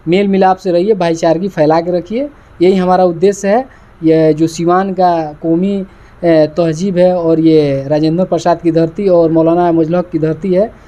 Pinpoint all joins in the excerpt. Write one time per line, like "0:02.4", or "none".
none